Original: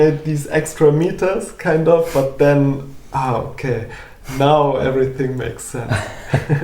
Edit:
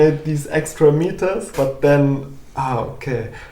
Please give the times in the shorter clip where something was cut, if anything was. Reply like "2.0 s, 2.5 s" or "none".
1.5 s